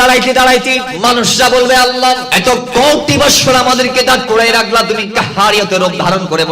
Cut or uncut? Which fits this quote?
cut